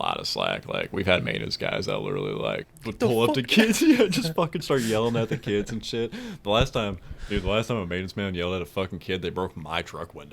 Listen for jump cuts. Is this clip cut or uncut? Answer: cut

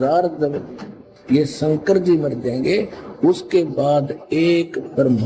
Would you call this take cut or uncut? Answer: uncut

